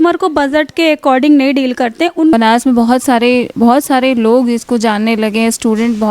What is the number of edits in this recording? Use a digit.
1